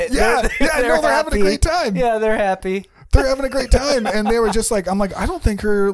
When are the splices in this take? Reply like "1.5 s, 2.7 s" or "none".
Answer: none